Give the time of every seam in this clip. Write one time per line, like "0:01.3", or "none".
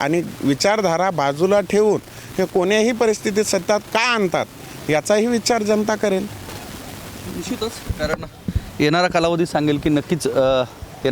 none